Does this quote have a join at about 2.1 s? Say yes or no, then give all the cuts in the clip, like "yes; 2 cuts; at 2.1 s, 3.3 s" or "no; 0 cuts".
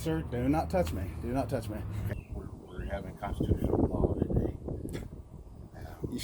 yes; 1 cut; at 2.1 s